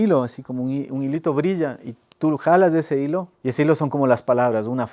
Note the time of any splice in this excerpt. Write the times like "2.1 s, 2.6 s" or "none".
3.4 s